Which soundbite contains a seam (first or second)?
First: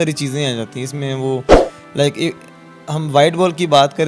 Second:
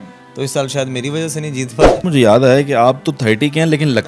second